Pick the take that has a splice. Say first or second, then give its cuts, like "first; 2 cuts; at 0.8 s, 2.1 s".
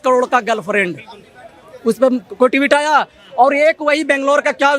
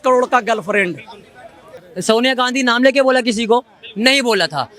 second; 1 cut; at 1.6 s